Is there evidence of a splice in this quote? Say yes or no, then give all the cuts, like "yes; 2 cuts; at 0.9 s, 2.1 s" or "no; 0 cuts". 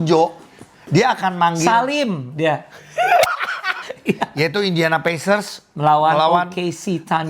yes; 1 cut; at 3.9 s